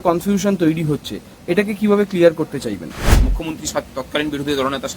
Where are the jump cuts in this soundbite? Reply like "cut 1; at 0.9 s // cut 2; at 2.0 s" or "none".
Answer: cut 1; at 3.1 s